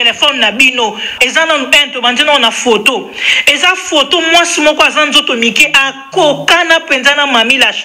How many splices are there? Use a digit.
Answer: 1